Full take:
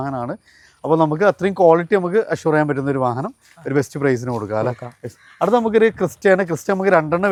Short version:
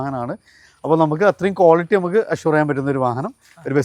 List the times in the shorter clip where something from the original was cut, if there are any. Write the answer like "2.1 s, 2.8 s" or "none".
none